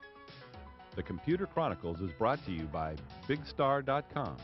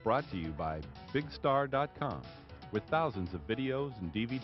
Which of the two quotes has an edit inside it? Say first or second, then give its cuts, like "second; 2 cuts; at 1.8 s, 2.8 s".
first; 1 cut; at 0.9 s